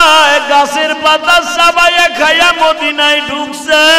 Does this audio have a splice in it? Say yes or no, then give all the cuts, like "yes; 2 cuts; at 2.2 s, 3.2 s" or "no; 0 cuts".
no; 0 cuts